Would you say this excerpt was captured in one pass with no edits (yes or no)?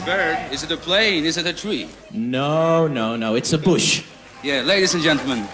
yes